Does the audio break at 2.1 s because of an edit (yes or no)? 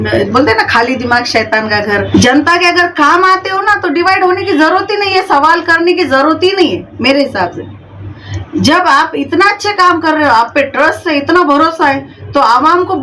yes